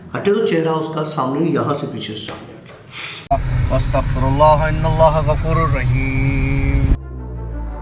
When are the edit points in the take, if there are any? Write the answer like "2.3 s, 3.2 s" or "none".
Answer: 3.2 s